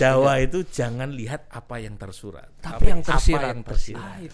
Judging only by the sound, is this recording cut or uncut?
uncut